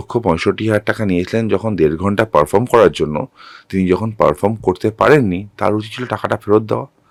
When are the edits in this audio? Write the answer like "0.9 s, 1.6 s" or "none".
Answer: none

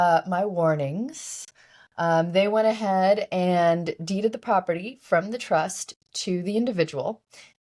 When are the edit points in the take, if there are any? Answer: none

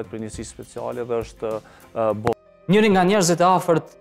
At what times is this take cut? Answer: 2.3 s

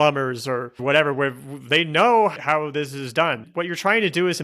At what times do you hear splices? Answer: 3.4 s

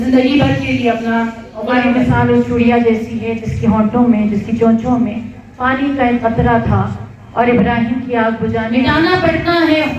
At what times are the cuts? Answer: 1.9 s, 8.7 s

